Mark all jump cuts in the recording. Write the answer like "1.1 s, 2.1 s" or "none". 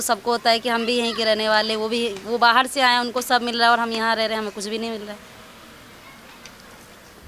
none

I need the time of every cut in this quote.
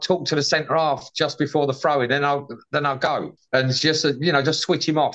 3.4 s

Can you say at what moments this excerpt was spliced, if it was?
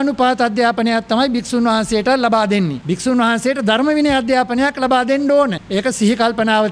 2.8 s, 5.6 s

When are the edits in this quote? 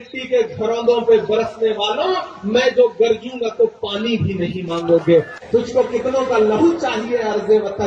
5.4 s

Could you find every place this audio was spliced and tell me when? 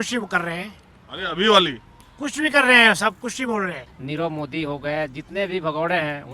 3.9 s

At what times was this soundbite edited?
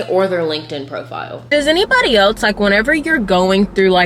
1.3 s

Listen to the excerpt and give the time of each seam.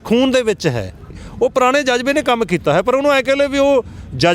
1.1 s

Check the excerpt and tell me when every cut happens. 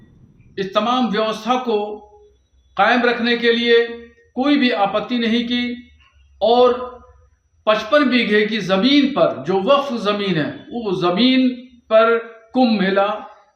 none

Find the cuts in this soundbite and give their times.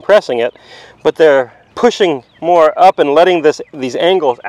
1.6 s

